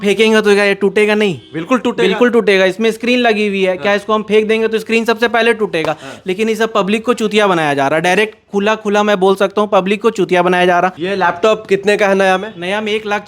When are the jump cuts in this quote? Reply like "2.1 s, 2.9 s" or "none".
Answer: 11.0 s